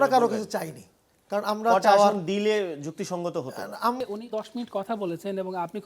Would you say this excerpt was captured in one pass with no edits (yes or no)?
no